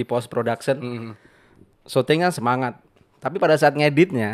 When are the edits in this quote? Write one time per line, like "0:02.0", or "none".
none

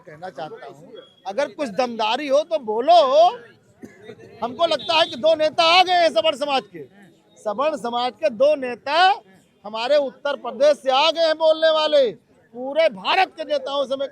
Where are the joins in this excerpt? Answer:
none

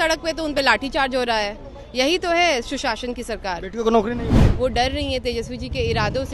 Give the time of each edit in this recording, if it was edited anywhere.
0:04.4

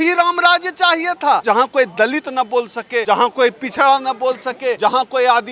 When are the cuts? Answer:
0:01.4
0:03.0
0:04.8

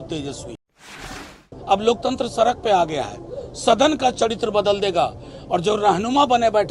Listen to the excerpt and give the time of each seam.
0:01.1

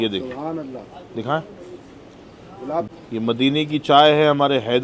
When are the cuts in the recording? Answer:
0:02.9

